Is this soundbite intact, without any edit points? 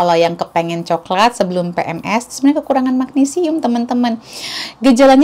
yes; 0 cuts

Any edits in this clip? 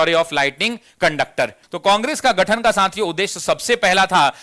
yes; 1 cut; at 1.6 s

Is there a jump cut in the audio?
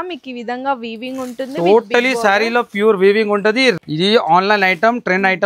yes; 1 cut; at 3.8 s

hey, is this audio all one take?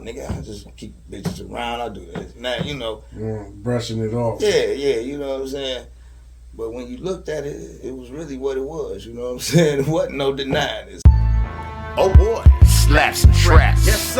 no; 1 cut; at 10.8 s

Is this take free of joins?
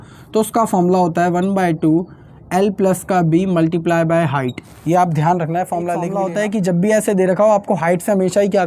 no; 1 cut; at 6.1 s

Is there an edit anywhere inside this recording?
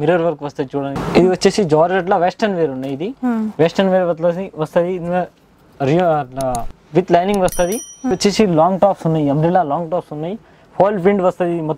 yes; 2 cuts; at 0.9 s, 8.1 s

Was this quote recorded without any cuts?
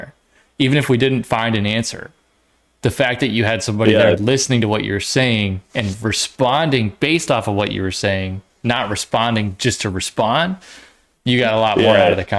yes; 0 cuts

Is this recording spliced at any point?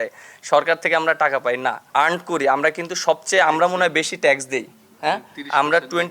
yes; 1 cut; at 1.8 s

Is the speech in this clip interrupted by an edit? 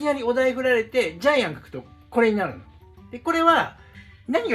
no; 0 cuts

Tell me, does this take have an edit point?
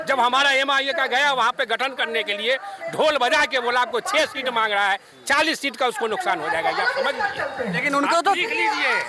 no; 0 cuts

